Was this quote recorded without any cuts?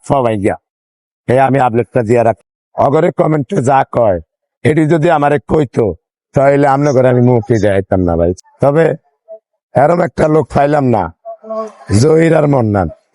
no; 2 cuts; at 2.4 s, 8.5 s

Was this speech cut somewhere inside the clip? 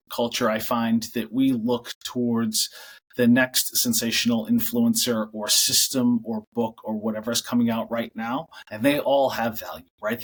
no; 0 cuts

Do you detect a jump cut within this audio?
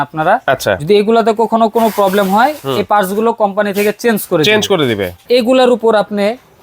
yes; 1 cut; at 5.1 s

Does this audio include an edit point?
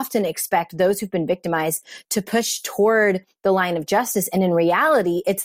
no; 0 cuts

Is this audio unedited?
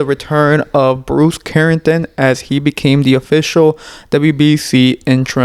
yes; 0 cuts

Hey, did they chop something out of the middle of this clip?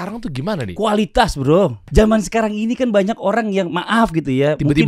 yes; 1 cut; at 1.8 s

